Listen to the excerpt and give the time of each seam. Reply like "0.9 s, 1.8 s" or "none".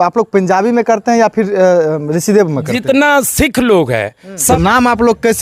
4.5 s